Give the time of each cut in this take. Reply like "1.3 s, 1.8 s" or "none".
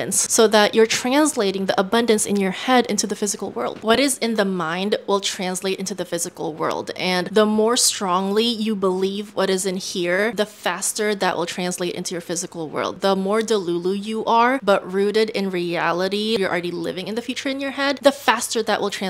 16.4 s